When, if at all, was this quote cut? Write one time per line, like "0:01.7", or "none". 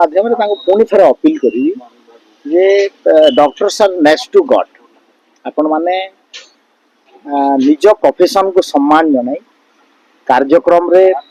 none